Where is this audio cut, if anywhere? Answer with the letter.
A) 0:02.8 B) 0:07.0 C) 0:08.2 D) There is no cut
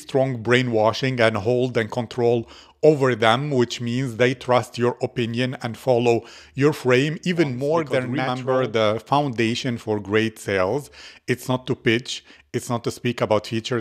C